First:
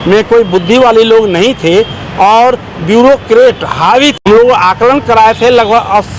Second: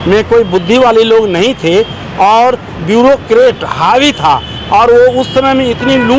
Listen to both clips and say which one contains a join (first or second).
first